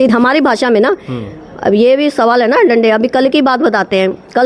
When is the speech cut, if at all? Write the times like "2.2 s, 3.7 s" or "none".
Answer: none